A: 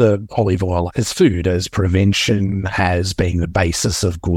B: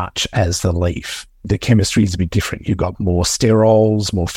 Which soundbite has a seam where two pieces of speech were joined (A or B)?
B